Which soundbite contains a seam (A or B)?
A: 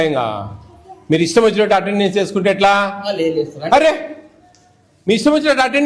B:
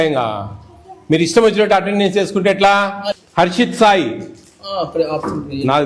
B